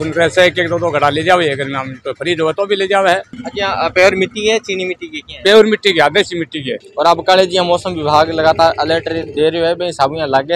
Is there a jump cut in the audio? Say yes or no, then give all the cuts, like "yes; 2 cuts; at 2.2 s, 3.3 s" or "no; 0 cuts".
yes; 2 cuts; at 3.3 s, 6.8 s